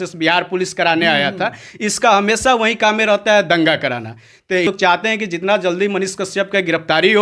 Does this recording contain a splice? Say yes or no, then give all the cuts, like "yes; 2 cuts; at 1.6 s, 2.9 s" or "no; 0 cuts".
yes; 1 cut; at 4.7 s